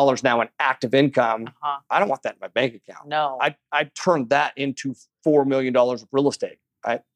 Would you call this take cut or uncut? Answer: uncut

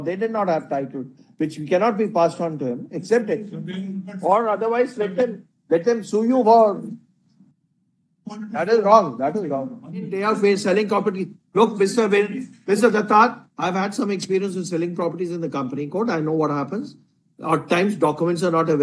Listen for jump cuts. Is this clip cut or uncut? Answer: cut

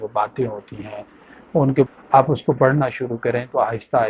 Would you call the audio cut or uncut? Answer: cut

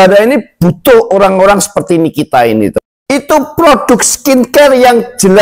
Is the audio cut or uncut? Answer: cut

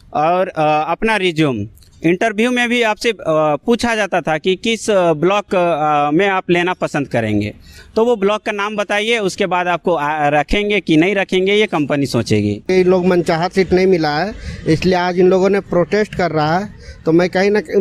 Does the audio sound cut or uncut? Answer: cut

